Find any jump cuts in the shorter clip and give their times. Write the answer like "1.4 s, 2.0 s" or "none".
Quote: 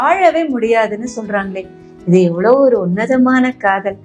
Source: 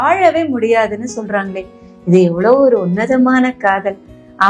none